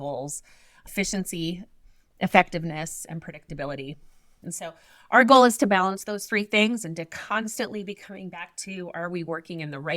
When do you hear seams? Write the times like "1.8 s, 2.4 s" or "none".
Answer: 4.3 s